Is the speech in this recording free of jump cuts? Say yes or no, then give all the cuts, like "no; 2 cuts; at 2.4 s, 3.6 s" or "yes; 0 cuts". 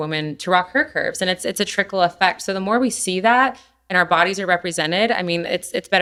yes; 0 cuts